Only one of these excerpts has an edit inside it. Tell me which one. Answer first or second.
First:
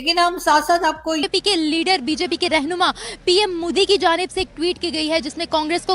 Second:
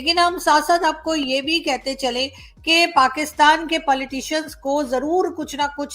first